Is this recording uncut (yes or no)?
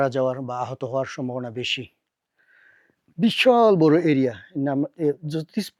yes